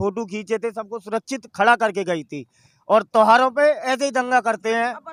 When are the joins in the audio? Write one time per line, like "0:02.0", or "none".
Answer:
none